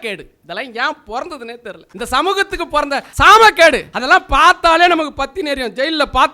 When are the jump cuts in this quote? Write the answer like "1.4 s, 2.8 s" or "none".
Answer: 1.8 s, 3.1 s, 3.9 s